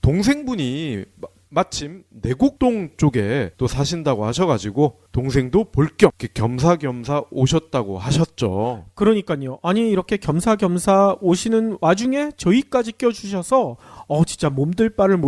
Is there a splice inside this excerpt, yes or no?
yes